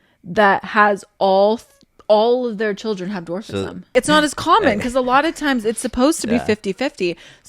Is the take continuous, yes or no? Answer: no